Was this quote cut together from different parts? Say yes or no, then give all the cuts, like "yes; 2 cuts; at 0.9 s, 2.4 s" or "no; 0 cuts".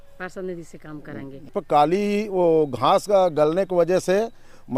yes; 1 cut; at 1.5 s